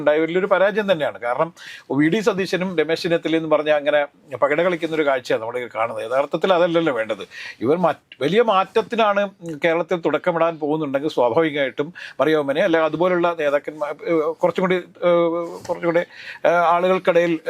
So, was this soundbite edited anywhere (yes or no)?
no